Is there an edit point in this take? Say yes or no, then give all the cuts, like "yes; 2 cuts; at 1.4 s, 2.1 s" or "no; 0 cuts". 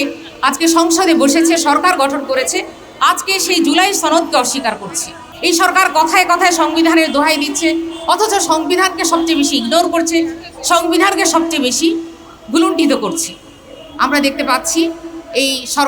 yes; 1 cut; at 5.2 s